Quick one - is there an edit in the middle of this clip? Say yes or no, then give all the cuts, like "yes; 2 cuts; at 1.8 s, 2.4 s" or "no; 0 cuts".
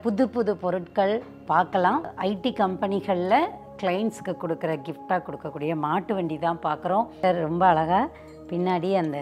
yes; 2 cuts; at 2.1 s, 7.1 s